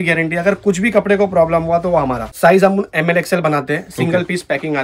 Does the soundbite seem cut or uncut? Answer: cut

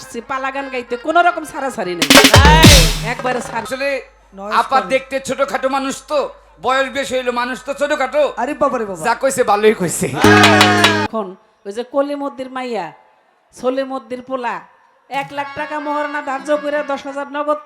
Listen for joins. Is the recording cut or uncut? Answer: cut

